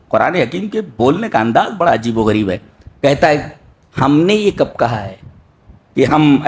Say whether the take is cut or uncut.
uncut